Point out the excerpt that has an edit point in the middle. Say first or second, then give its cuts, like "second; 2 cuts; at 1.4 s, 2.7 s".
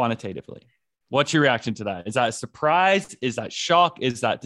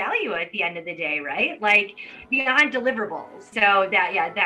second; 1 cut; at 3.4 s